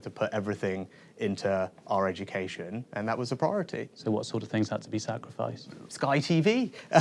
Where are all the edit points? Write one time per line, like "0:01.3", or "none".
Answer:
0:05.8